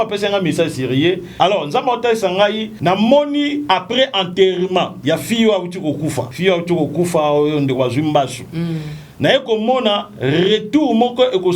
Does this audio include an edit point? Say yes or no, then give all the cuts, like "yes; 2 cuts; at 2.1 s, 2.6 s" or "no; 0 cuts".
yes; 4 cuts; at 1.3 s, 2.7 s, 5.0 s, 6.3 s